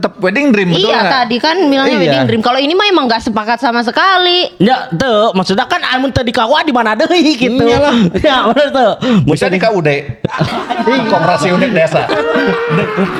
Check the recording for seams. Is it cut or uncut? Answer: uncut